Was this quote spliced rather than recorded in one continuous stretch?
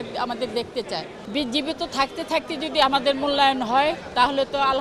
yes; 1 cut; at 1.2 s

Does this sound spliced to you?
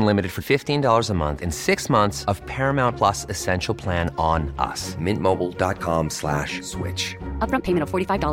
no; 0 cuts

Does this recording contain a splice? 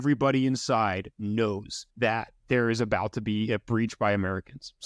yes; 1 cut; at 2.1 s

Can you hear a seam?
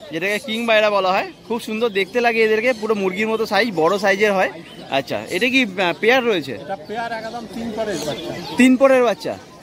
no; 0 cuts

